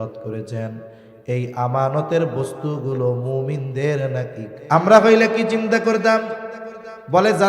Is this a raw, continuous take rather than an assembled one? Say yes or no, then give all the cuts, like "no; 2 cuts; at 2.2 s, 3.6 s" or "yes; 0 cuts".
no; 1 cut; at 4.5 s